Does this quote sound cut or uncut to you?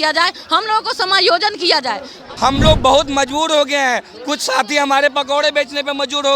cut